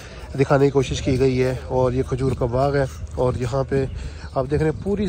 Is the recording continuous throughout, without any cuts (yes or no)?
yes